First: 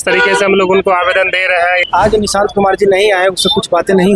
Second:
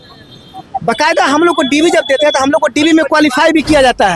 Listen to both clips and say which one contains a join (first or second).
first